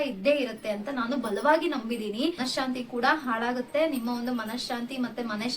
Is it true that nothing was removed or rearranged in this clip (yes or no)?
no